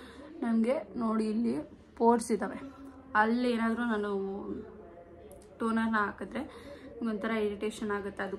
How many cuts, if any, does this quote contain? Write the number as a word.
zero